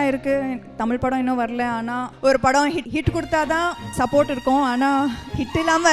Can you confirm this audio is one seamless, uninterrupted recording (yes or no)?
no